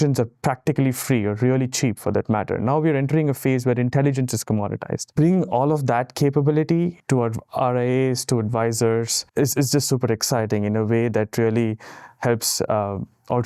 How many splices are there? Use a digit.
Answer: 3